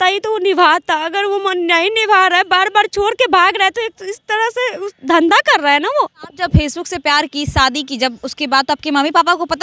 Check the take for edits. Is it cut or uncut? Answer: cut